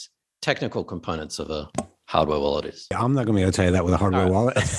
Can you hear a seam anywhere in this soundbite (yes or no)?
yes